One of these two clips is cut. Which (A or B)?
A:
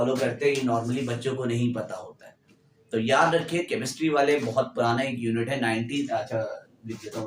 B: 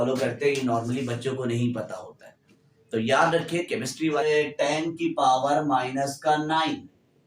B